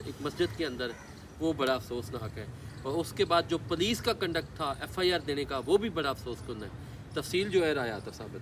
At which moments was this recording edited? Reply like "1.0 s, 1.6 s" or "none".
none